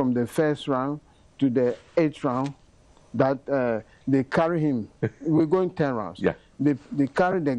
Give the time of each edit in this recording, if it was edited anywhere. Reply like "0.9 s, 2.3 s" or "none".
none